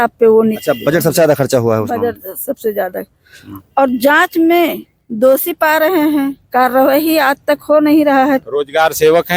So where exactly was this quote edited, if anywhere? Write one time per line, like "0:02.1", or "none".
0:08.4